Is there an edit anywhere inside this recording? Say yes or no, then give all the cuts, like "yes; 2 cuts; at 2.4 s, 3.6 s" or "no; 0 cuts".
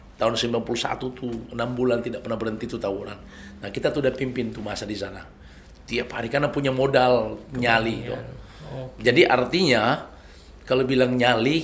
no; 0 cuts